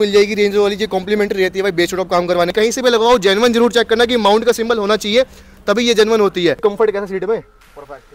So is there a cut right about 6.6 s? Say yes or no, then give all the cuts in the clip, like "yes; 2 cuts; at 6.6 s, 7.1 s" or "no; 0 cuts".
yes; 2 cuts; at 2.5 s, 6.6 s